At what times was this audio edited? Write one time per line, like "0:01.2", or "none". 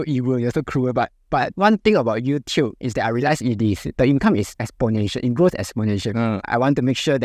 0:01.2
0:04.6
0:06.4